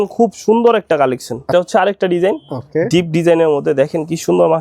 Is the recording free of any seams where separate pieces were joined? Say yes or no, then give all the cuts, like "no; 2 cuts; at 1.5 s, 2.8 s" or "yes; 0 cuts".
no; 1 cut; at 1.5 s